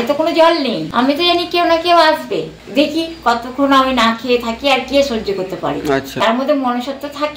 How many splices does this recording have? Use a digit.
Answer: 3